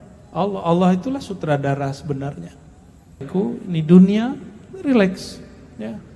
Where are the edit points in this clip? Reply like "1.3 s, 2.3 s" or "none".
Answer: 3.3 s